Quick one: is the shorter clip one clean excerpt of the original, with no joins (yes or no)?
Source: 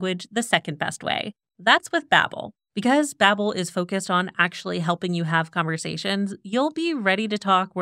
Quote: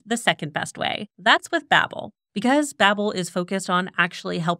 no